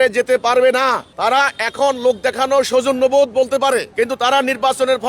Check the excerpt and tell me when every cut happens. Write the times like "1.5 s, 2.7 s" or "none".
1.1 s, 3.9 s